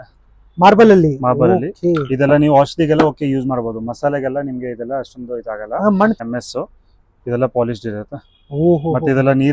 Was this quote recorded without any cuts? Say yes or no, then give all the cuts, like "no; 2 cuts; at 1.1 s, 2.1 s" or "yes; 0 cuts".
no; 1 cut; at 6.2 s